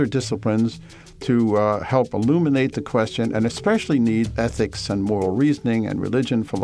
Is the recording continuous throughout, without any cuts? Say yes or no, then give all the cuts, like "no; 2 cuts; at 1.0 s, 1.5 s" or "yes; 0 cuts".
no; 1 cut; at 4.3 s